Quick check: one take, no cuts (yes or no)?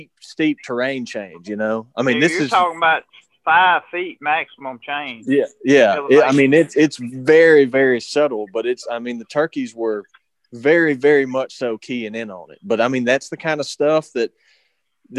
yes